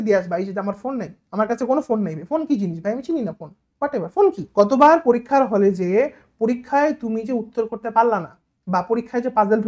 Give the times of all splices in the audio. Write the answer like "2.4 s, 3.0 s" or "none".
4.7 s